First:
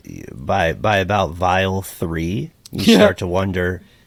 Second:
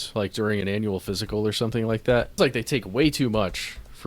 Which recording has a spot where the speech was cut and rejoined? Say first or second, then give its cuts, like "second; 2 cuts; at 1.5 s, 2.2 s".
second; 1 cut; at 2.3 s